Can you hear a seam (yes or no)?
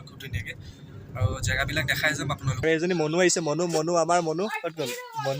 yes